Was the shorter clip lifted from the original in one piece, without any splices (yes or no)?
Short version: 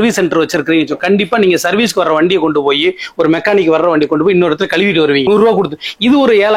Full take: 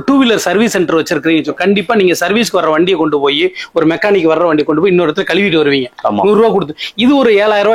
no